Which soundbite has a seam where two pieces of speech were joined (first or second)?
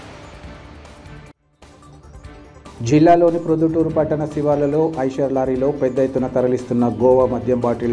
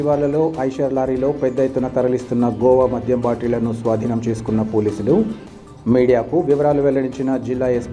first